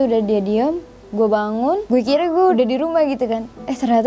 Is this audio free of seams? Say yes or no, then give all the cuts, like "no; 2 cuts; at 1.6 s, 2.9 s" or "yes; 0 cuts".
no; 1 cut; at 2.5 s